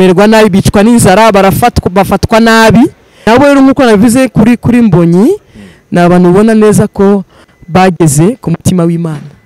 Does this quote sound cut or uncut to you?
cut